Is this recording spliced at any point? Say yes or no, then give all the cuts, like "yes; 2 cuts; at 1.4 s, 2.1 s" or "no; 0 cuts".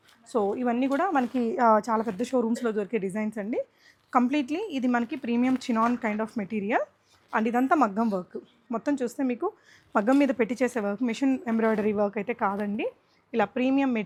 no; 0 cuts